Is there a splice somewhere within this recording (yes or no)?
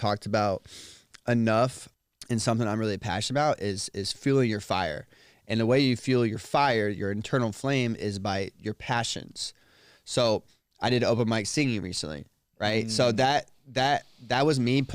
no